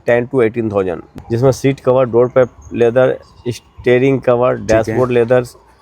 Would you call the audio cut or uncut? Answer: cut